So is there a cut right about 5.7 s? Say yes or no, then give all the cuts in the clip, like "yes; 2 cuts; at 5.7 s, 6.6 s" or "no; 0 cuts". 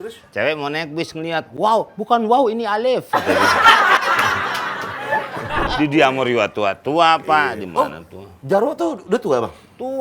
yes; 1 cut; at 5.7 s